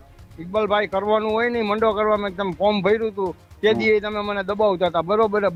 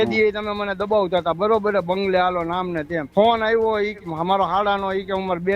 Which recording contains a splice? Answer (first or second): second